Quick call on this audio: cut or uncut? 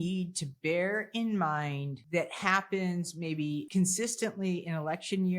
cut